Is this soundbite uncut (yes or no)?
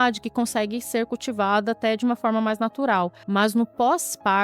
no